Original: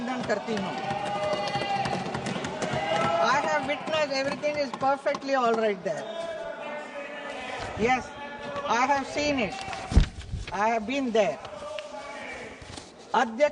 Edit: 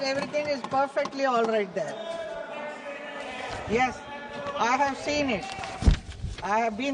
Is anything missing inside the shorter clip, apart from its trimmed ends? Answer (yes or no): no